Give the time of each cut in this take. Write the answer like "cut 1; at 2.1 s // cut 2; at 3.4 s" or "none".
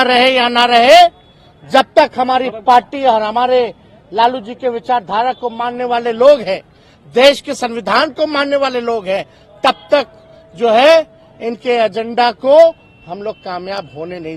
none